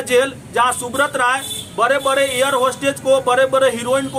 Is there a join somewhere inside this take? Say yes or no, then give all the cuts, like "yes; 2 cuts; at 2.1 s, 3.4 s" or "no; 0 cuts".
no; 0 cuts